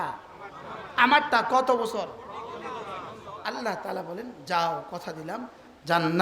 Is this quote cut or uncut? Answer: cut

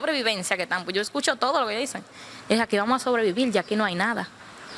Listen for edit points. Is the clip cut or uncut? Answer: uncut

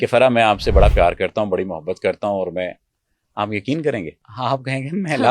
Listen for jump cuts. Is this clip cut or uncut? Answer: cut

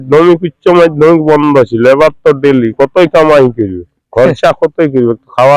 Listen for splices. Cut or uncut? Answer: uncut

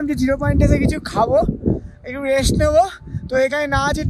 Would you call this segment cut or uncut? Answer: uncut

